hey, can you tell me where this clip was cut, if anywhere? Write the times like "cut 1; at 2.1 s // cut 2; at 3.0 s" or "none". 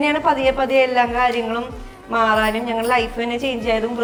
none